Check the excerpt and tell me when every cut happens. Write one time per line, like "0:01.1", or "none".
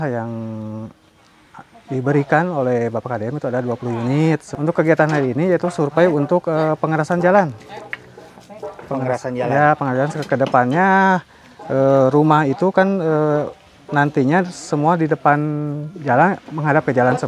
0:04.5